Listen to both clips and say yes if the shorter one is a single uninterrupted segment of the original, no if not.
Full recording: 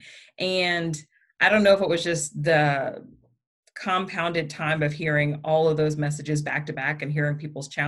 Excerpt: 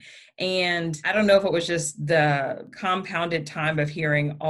no